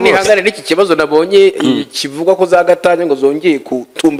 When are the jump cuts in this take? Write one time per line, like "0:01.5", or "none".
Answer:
none